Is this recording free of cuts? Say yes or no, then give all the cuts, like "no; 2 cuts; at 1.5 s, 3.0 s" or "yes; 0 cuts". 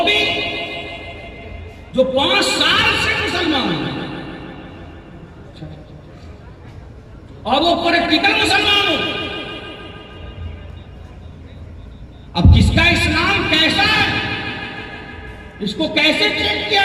yes; 0 cuts